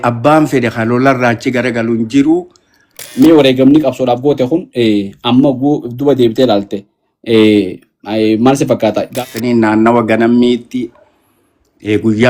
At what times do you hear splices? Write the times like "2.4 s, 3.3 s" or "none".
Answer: 3.1 s, 9.1 s